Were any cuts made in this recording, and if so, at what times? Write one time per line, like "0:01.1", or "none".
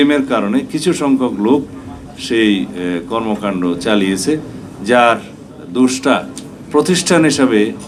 none